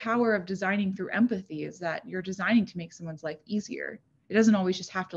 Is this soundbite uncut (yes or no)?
yes